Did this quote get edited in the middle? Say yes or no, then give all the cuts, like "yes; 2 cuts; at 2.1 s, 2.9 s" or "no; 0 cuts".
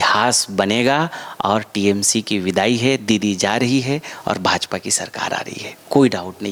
no; 0 cuts